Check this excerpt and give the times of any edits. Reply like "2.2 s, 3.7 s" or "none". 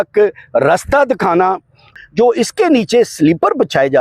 1.9 s